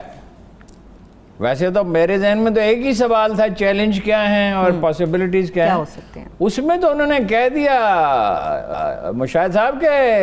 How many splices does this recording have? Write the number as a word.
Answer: zero